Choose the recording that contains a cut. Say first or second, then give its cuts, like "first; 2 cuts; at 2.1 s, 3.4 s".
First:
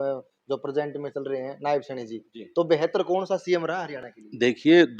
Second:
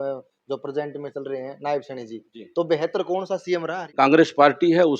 second; 1 cut; at 3.9 s